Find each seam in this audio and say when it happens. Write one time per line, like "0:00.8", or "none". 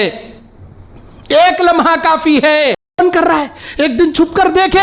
0:03.0